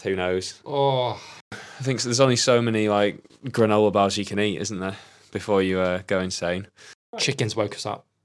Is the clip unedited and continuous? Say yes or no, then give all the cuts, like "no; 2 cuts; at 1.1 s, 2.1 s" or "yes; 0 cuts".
no; 2 cuts; at 1.5 s, 7.3 s